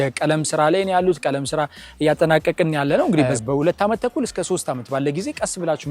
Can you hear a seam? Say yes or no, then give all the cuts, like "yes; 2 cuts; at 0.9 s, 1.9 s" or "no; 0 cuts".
yes; 1 cut; at 3.3 s